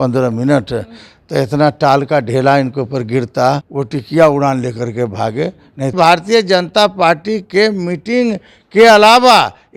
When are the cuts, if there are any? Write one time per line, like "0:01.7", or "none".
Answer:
0:03.7
0:05.9